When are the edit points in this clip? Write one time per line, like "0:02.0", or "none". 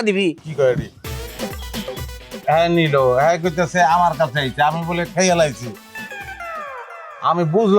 0:02.4

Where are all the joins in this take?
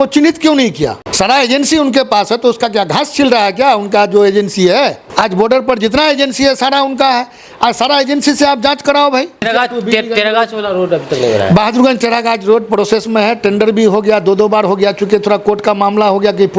0:01.0
0:05.0
0:09.5

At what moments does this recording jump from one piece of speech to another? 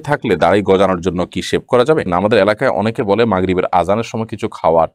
0:02.1

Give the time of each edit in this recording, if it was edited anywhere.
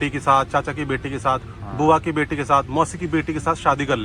none

